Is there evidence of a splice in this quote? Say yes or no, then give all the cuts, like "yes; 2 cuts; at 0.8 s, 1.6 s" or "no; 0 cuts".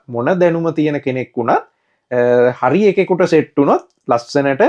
no; 0 cuts